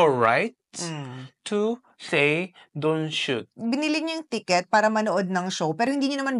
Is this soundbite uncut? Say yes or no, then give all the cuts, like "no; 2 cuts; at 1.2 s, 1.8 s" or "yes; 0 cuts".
no; 1 cut; at 3.5 s